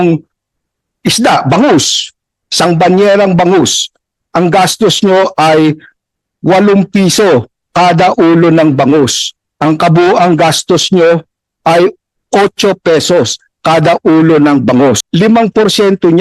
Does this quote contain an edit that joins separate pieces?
yes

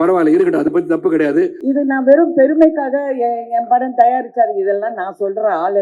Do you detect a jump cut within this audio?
yes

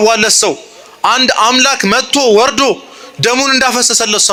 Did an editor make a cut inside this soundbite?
no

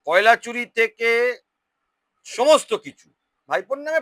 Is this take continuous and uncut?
yes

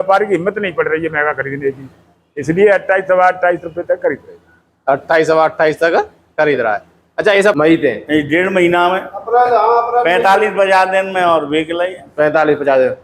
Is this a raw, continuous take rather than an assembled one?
no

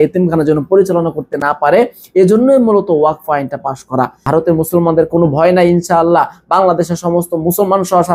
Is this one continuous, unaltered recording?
no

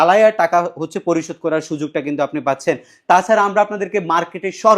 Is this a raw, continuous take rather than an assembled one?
yes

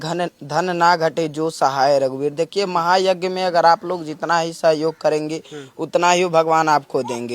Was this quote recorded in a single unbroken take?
yes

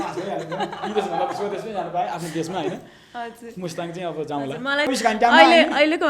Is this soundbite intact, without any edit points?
no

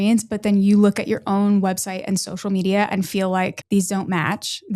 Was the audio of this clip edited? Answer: yes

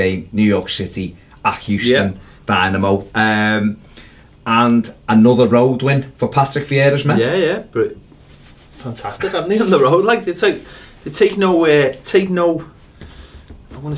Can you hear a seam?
no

